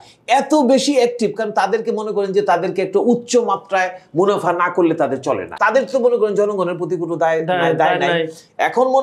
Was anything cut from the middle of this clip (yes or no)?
yes